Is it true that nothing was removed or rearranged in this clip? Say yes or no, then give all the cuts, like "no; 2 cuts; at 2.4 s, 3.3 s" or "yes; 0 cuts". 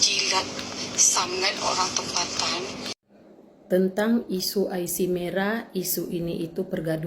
no; 1 cut; at 2.9 s